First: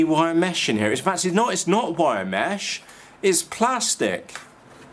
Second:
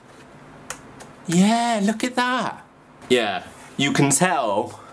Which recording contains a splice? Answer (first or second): second